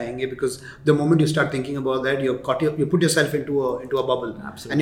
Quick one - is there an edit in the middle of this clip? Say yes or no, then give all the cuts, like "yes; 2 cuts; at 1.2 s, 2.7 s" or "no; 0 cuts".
no; 0 cuts